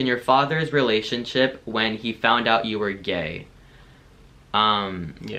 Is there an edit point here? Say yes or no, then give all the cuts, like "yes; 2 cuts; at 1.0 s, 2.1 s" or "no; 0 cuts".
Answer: no; 0 cuts